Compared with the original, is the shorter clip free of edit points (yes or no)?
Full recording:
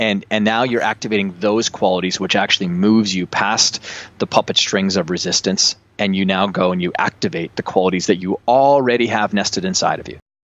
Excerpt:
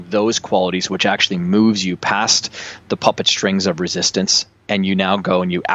yes